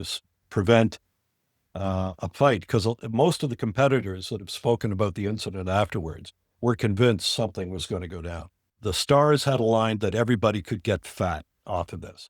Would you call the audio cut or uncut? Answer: cut